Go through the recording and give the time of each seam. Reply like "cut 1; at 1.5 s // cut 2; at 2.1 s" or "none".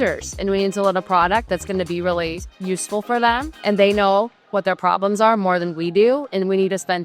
cut 1; at 3.5 s